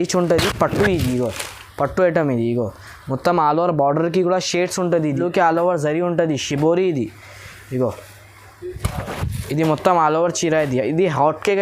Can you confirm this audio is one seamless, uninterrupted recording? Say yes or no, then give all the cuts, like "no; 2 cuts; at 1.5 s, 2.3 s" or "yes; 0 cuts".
no; 1 cut; at 5.1 s